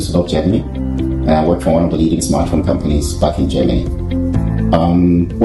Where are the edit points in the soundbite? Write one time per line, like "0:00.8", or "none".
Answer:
none